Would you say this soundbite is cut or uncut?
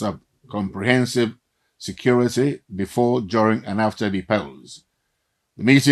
uncut